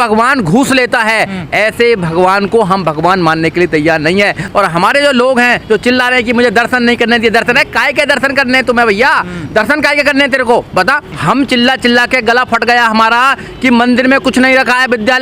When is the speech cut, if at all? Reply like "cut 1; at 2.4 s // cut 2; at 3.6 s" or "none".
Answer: cut 1; at 4.4 s // cut 2; at 11.1 s